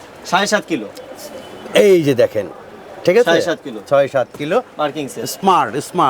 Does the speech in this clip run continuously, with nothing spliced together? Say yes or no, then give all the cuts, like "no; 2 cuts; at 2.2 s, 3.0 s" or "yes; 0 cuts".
yes; 0 cuts